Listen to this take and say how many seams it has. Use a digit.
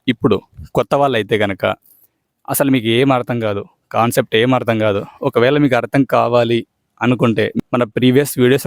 1